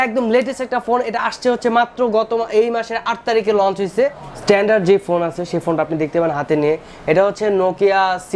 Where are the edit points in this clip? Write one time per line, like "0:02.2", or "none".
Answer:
0:04.3